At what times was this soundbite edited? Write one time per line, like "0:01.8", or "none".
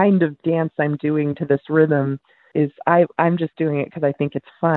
0:02.4